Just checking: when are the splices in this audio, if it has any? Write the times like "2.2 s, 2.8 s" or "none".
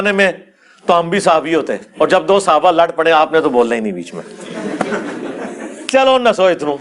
1.8 s